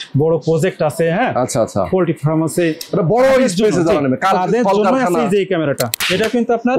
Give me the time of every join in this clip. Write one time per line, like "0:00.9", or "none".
0:05.9